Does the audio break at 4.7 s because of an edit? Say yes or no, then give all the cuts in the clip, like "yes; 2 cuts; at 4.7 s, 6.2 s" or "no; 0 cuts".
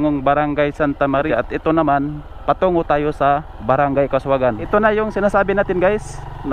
yes; 2 cuts; at 1.3 s, 4.7 s